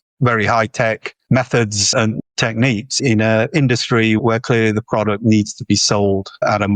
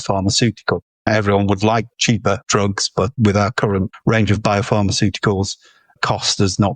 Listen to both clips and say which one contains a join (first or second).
second